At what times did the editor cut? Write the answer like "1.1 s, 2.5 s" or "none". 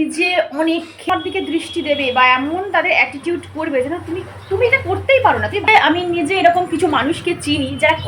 1.1 s, 5.7 s